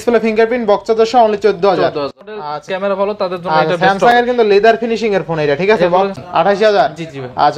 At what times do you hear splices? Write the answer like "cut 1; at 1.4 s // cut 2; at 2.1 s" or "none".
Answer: cut 1; at 2.4 s // cut 2; at 6.1 s